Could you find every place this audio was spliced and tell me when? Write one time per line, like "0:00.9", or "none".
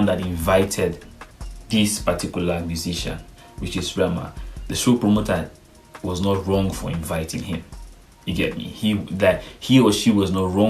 none